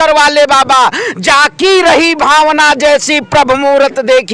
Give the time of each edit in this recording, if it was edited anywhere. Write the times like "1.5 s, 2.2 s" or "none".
none